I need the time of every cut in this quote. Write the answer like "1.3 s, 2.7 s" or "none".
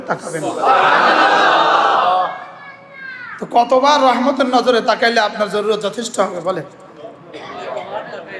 none

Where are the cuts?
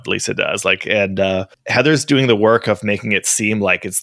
none

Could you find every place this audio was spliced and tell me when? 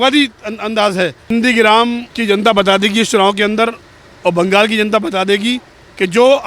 1.3 s, 2.1 s

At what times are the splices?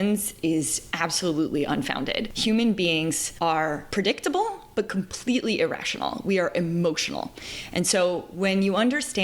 2.3 s, 3.6 s

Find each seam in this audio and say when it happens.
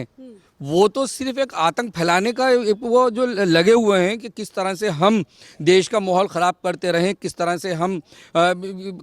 none

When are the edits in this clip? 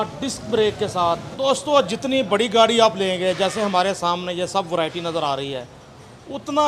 1.3 s

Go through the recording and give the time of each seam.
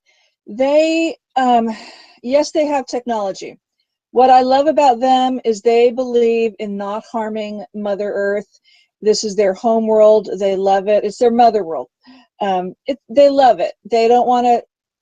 none

